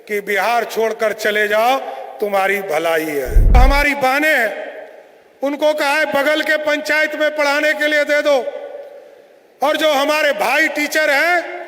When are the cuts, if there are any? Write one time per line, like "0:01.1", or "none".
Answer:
0:03.6